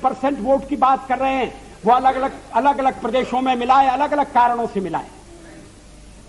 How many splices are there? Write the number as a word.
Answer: zero